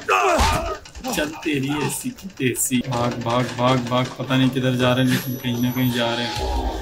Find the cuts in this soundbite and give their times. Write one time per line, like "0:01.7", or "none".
0:02.8